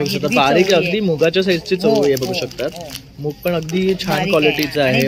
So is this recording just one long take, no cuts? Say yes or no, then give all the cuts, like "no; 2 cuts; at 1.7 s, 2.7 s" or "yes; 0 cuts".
yes; 0 cuts